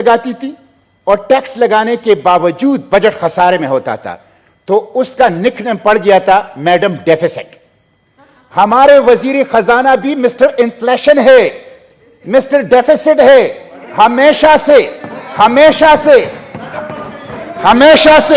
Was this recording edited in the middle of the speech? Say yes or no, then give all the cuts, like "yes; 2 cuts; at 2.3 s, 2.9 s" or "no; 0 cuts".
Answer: no; 0 cuts